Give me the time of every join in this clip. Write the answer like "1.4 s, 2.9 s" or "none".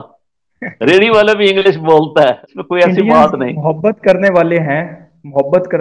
2.5 s